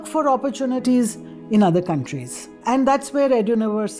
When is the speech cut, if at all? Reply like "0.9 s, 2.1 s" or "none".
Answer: 0.8 s, 2.6 s